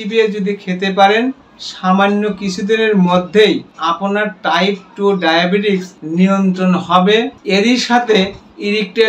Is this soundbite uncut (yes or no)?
no